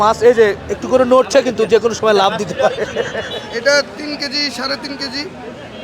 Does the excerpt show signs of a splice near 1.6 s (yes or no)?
no